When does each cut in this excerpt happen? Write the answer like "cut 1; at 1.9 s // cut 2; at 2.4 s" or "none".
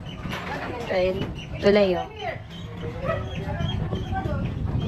none

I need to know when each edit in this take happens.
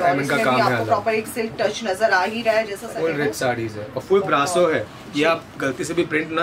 cut 1; at 2.9 s

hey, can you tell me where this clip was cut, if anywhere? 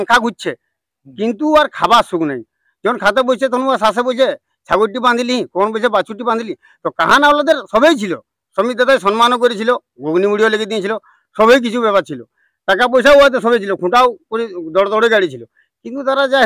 none

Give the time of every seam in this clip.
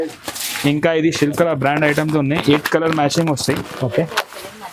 none

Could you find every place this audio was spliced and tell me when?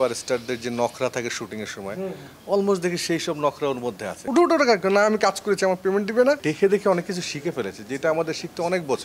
cut 1; at 4.2 s // cut 2; at 6.4 s

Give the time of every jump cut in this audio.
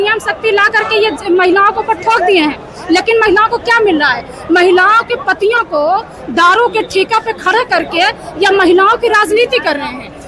none

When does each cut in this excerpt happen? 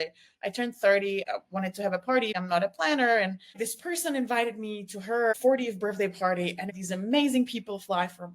cut 1; at 1.2 s // cut 2; at 2.3 s // cut 3; at 3.6 s // cut 4; at 5.3 s // cut 5; at 6.7 s

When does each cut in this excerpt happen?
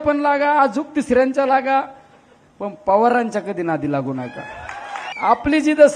cut 1; at 5.1 s

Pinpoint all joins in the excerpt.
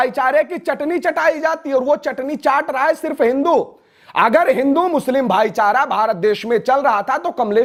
none

